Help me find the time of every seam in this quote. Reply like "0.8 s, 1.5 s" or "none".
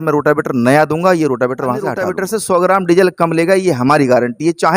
2.1 s

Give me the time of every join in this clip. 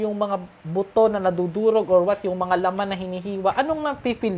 none

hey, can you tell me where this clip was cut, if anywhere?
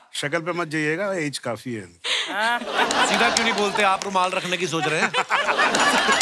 none

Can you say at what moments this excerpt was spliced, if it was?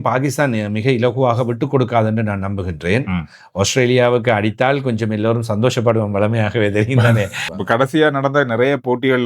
7.4 s

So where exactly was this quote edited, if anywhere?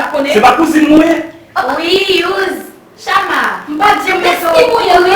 4.0 s

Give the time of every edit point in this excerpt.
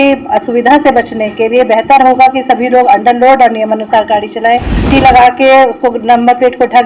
4.8 s

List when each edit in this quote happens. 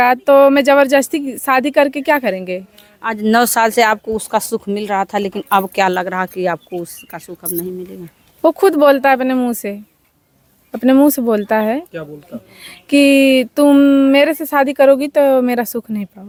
none

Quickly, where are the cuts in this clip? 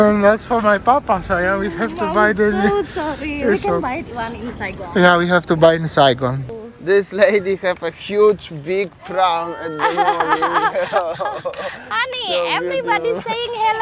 6.4 s

